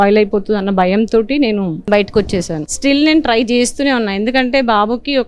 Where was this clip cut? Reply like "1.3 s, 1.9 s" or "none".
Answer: 1.8 s, 2.7 s